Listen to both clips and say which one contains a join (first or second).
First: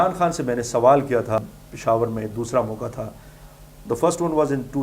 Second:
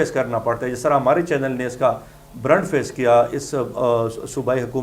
first